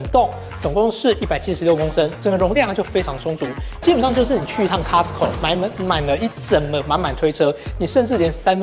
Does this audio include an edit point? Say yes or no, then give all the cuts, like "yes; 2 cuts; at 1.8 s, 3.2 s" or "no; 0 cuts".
no; 0 cuts